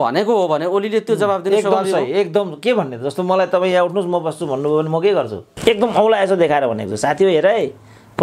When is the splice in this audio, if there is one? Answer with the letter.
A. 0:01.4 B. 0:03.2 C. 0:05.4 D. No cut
C